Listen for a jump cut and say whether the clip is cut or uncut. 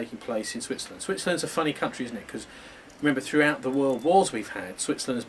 uncut